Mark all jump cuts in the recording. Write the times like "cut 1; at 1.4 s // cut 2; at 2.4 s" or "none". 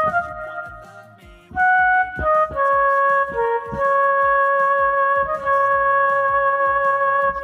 none